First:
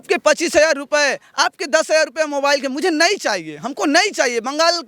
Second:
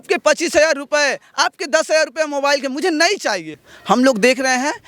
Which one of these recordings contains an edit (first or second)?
second